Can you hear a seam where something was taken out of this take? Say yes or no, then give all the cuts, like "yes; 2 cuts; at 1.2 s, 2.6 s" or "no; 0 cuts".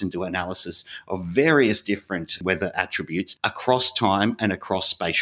yes; 2 cuts; at 2.3 s, 3.3 s